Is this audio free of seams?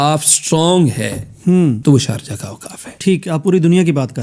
no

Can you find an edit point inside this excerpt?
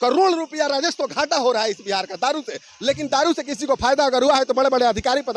no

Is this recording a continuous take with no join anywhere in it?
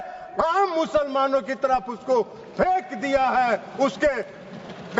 yes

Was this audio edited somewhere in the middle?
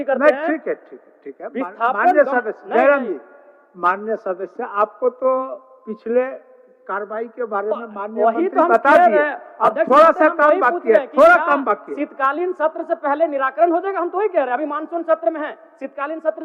no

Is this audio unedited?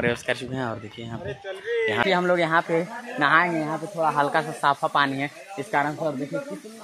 no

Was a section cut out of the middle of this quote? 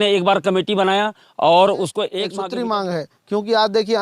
yes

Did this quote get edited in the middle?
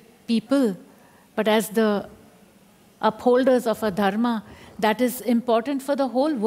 no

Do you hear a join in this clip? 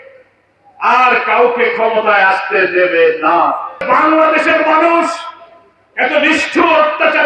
yes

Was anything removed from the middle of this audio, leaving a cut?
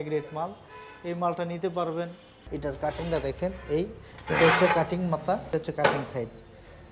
yes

